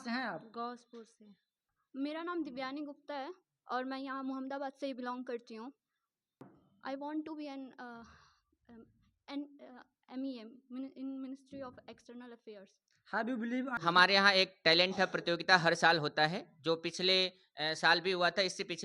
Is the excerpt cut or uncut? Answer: cut